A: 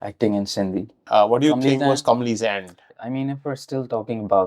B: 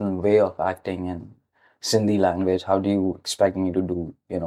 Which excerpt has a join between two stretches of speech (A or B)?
A